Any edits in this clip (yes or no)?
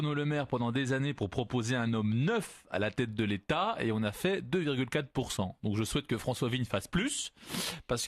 yes